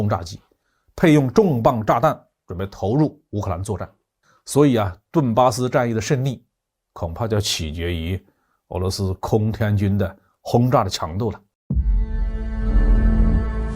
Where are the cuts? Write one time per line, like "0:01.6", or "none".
0:11.5